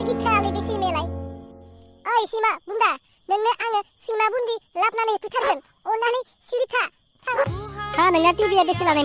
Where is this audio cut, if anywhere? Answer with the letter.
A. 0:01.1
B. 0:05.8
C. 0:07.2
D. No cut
C